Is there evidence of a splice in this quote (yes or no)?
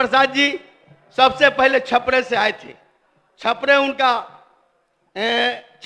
no